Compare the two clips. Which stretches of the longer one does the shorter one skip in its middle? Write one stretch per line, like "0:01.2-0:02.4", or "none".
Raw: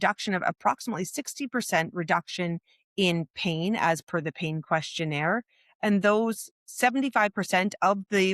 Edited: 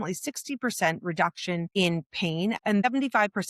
0:02.6-0:02.9
0:03.8-0:06.6

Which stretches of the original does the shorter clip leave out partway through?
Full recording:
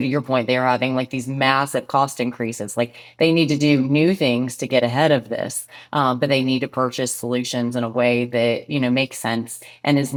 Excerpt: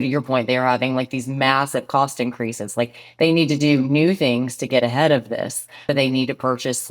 0:05.8-0:06.2

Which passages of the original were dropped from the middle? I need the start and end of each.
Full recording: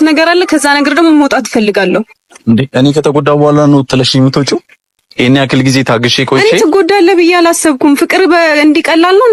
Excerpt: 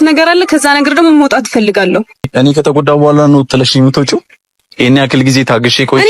0:02.3-0:02.7

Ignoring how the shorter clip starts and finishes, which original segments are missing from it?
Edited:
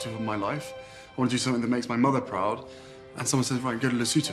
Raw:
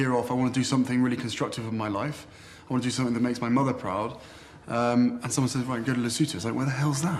0:04.7-0:05.2

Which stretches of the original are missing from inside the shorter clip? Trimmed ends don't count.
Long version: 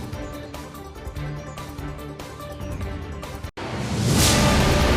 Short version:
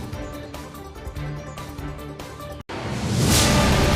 0:02.6-0:03.5

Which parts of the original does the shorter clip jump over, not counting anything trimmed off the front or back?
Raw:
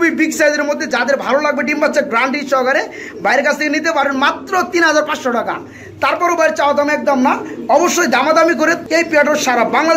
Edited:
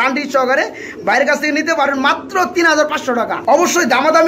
0:05.5-0:07.6

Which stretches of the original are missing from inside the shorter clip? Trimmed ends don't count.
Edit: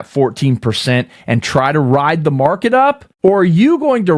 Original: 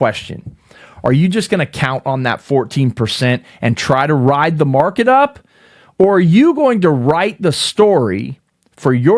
0:05.4-0:05.8

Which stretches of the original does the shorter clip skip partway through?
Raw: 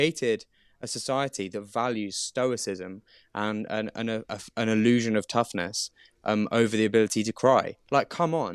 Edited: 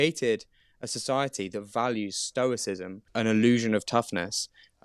0:03.0-0:04.4

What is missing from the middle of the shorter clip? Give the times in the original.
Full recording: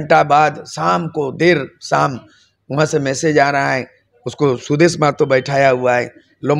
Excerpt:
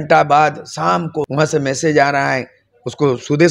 0:01.2-0:02.6

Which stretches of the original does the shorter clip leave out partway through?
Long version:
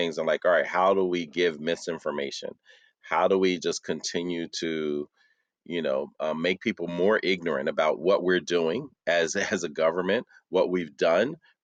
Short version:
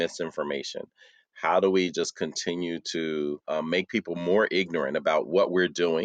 0:05.1-0:06.1

